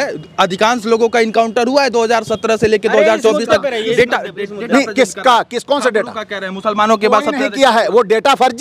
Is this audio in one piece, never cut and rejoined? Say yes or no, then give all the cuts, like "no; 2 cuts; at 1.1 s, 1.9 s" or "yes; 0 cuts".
yes; 0 cuts